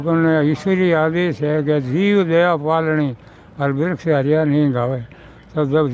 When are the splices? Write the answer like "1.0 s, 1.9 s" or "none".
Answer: none